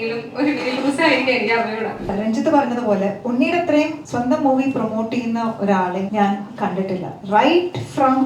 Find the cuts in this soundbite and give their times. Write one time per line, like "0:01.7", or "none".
0:02.1
0:04.1
0:06.1
0:07.1

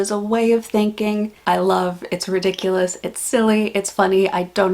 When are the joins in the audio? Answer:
0:01.4

